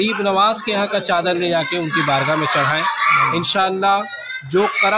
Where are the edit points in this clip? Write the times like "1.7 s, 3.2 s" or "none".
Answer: none